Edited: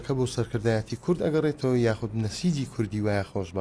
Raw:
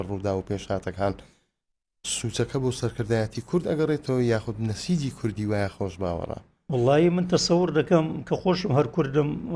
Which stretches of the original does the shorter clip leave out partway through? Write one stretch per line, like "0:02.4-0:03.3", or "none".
none